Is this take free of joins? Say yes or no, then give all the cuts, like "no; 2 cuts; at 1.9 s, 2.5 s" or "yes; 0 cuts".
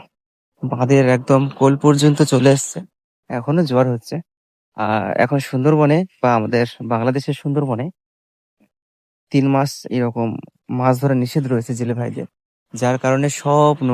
yes; 0 cuts